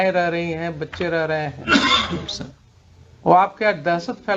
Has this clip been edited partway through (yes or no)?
no